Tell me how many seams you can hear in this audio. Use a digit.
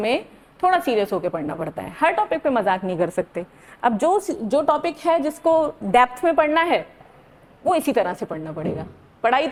0